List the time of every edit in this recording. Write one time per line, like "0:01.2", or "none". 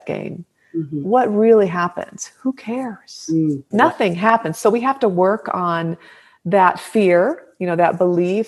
0:03.6